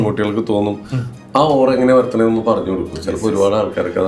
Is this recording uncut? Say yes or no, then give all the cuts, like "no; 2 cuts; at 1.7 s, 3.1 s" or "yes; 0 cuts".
yes; 0 cuts